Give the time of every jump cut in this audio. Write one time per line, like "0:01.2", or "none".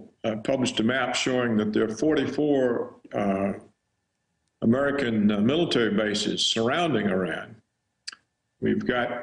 none